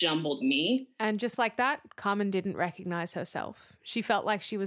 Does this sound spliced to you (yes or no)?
no